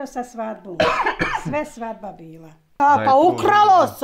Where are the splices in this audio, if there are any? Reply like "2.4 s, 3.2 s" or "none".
2.7 s